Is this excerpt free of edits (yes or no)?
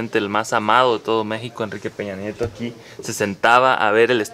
yes